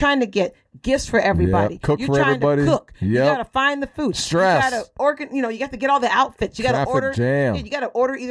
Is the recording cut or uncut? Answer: uncut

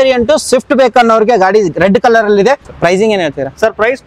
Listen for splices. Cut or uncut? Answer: cut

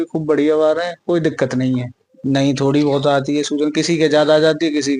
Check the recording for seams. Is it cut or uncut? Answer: cut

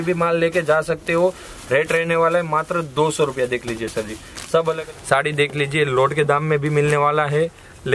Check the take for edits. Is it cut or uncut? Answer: cut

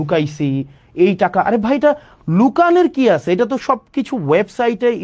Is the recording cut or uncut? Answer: uncut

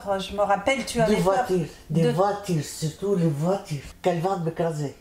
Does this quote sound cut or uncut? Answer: cut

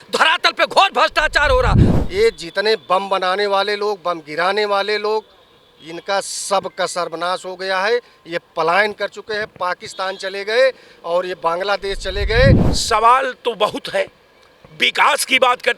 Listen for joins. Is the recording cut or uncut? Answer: cut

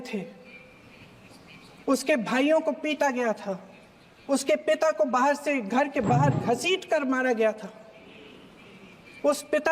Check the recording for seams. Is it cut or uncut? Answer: uncut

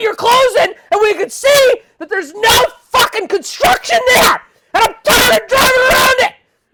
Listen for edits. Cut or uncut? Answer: uncut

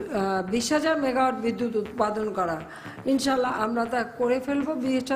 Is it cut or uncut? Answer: uncut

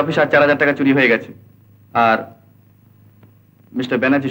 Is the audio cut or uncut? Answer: uncut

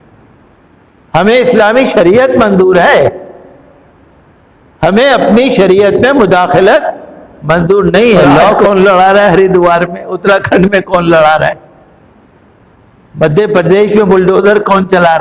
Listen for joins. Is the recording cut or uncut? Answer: cut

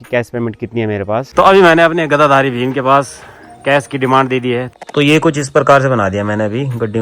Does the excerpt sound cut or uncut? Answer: cut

